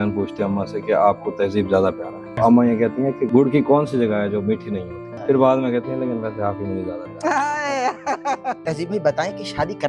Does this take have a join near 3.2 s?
yes; 4 cuts; at 2.4 s, 3.2 s, 5.1 s, 8.6 s

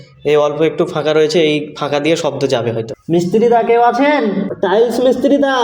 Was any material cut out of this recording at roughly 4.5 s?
yes; 2 cuts; at 3.0 s, 4.5 s

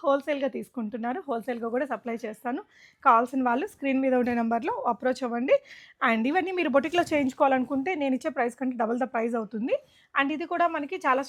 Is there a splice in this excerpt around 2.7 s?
no; 0 cuts

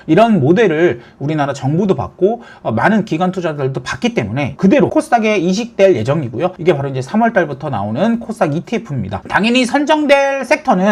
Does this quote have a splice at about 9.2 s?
yes; 3 cuts; at 4.5 s, 6.6 s, 9.2 s

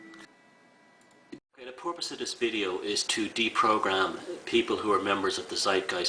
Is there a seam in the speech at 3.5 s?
yes; 1 cut; at 3.5 s

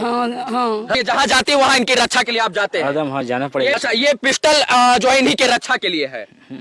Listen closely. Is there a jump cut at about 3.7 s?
yes; 2 cuts; at 1.0 s, 3.7 s

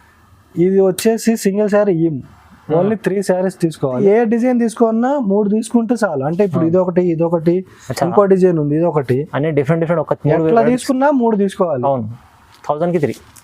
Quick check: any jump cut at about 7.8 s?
no; 1 cut; at 4.0 s

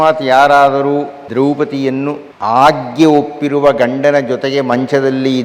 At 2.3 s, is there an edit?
yes; 2 cuts; at 1.2 s, 2.3 s

